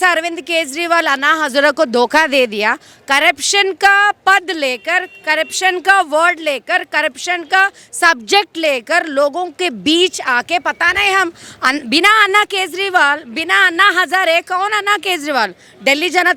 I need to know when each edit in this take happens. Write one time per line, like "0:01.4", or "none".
none